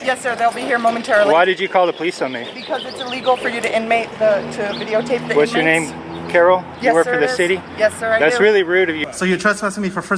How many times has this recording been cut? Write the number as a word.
one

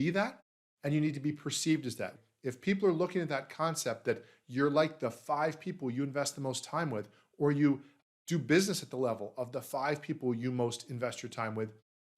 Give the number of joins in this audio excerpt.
one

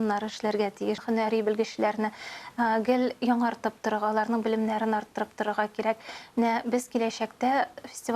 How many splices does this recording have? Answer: one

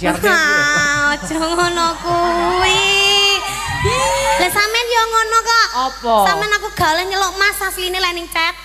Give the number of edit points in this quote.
one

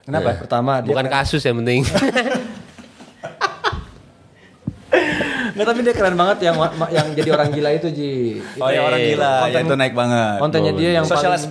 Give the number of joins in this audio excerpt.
zero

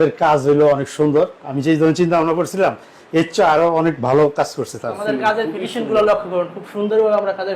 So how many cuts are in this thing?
one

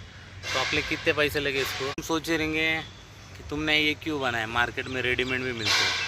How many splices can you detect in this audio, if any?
one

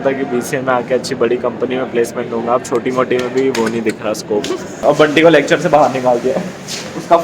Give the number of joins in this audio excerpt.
one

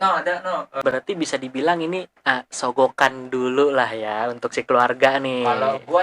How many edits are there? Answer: one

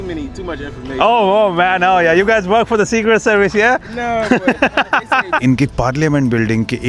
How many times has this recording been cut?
one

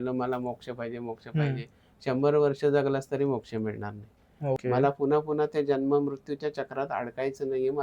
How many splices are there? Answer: one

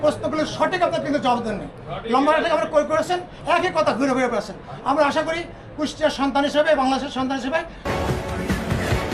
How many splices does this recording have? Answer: one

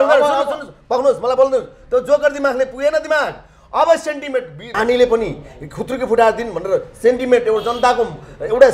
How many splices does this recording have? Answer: one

